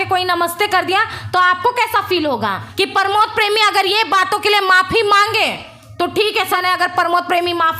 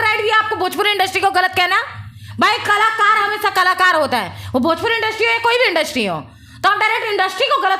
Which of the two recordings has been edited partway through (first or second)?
first